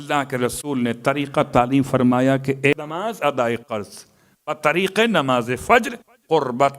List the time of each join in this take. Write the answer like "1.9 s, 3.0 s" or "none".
2.7 s